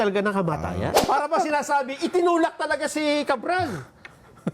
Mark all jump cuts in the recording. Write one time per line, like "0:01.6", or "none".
0:00.9

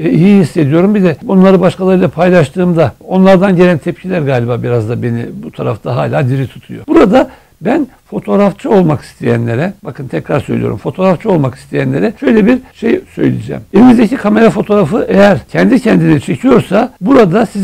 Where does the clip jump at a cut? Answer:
0:06.8

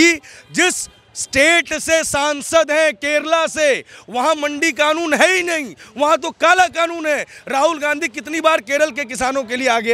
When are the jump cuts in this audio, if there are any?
none

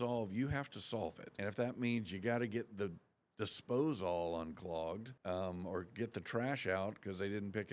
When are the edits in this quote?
0:01.3
0:05.1

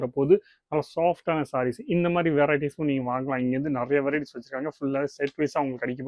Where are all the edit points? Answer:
none

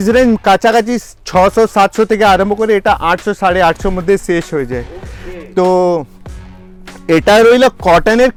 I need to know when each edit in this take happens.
none

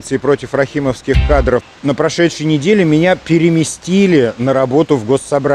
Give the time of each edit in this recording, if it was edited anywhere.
0:01.7

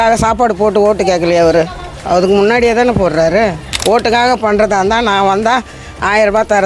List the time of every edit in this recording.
0:03.7

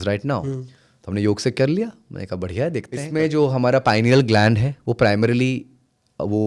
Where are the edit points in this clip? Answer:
0:03.0

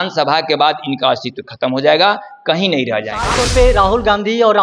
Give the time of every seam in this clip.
0:03.3

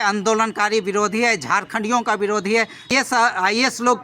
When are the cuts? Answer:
0:02.5

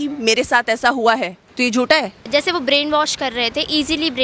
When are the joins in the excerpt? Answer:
0:01.4
0:02.2

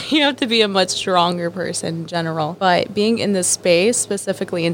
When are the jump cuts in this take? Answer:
0:02.5

